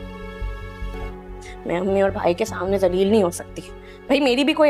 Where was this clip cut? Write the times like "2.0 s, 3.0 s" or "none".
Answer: 0.9 s